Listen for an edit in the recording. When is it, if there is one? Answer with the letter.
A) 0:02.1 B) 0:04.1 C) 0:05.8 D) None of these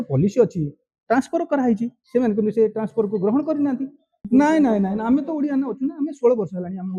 B